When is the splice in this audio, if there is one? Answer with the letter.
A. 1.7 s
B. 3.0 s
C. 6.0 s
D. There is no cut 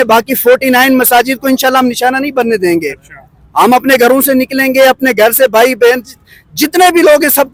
D